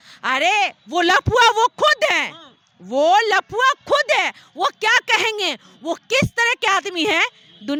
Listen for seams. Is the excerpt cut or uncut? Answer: uncut